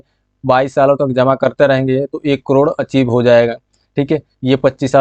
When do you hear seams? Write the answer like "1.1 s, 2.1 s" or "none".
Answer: none